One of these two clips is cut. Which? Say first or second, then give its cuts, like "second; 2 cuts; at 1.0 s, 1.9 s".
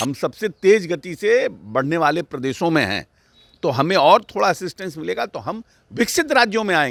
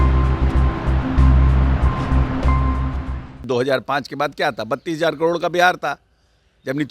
second; 1 cut; at 3.4 s